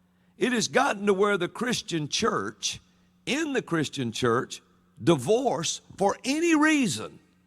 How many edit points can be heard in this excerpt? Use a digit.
1